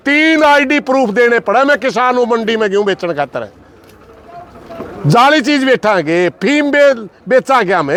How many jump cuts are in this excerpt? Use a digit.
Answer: 0